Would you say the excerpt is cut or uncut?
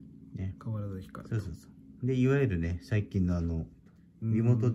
uncut